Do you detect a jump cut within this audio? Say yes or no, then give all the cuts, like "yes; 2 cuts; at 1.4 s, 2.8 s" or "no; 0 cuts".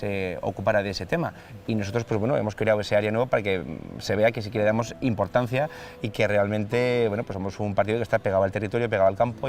no; 0 cuts